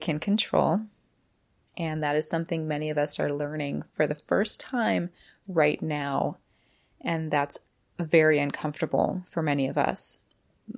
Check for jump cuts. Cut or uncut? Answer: uncut